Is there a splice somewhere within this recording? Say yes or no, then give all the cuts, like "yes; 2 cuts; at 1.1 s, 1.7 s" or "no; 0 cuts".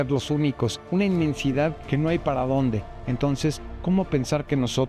no; 0 cuts